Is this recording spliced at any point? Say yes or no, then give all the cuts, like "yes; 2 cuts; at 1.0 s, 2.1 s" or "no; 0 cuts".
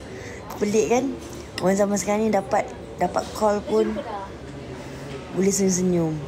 no; 0 cuts